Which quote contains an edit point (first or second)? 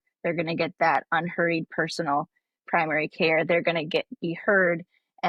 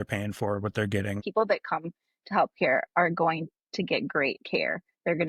second